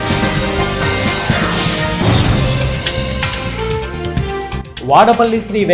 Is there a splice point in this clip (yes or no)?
yes